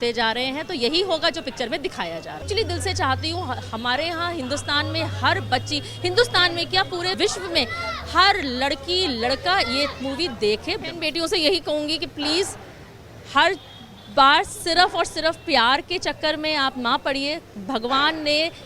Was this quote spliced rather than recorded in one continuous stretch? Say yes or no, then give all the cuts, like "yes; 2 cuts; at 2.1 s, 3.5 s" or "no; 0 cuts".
yes; 2 cuts; at 2.4 s, 10.8 s